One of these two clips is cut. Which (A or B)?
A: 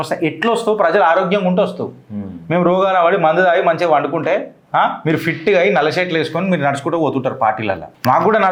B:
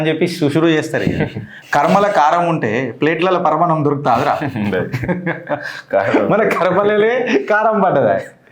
B